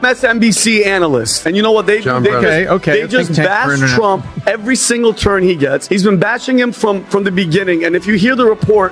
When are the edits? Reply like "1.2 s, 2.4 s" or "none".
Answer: none

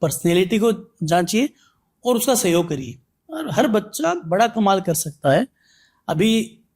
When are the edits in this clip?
none

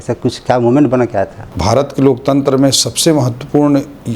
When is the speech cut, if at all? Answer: 1.4 s

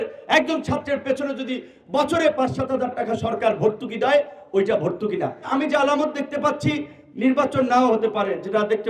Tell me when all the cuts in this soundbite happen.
5.5 s

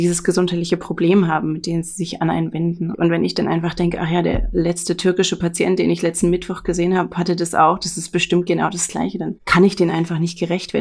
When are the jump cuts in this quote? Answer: 2.9 s, 9.4 s

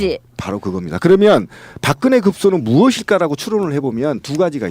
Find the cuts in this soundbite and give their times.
2.6 s

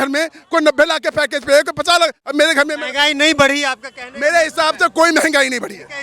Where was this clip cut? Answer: 2.2 s

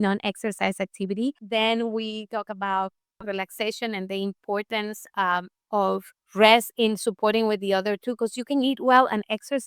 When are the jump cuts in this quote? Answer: 1.4 s, 6.2 s

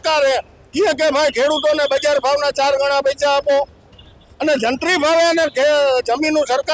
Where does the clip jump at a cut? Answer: none

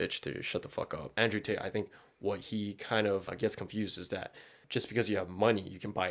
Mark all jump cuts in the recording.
1.1 s, 3.3 s, 4.6 s

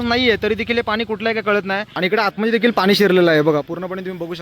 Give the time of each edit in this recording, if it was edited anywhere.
1.9 s

